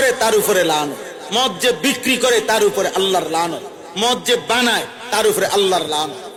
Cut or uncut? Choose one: uncut